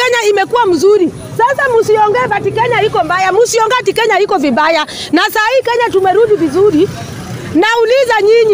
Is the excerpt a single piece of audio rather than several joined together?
yes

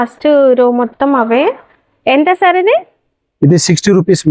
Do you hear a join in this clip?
no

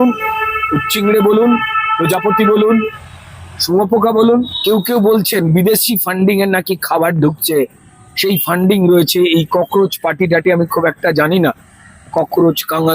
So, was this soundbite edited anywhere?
yes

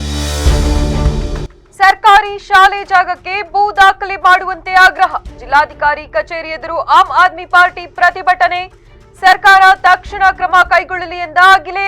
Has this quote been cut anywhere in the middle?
yes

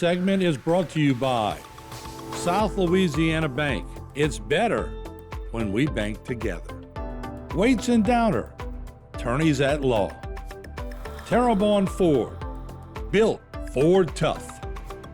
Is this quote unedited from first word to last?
no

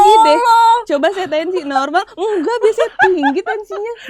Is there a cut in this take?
no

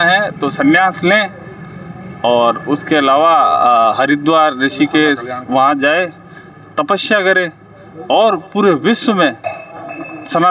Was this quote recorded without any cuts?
yes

